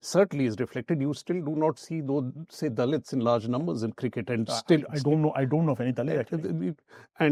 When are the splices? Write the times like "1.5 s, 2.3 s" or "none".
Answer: none